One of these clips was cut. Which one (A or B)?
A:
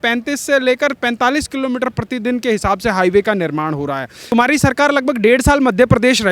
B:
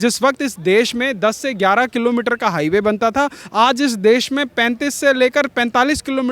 A